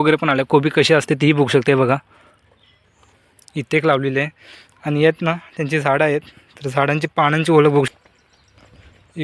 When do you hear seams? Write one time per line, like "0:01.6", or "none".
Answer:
0:07.9